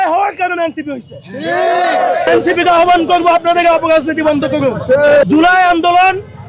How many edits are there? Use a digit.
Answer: 2